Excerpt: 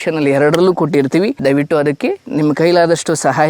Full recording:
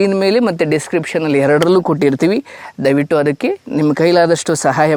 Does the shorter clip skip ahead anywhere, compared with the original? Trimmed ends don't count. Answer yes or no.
yes